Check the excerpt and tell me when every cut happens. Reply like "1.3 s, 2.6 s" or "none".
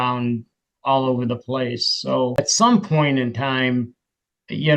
2.3 s